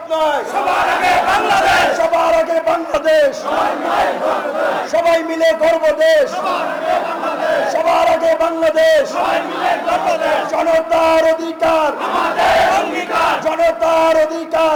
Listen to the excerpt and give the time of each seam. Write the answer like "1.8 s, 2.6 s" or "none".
none

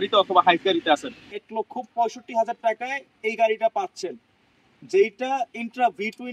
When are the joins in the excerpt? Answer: 1.3 s

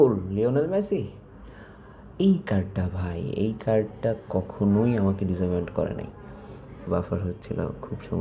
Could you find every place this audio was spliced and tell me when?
6.8 s

